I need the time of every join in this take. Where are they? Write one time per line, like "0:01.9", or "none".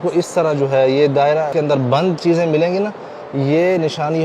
0:01.5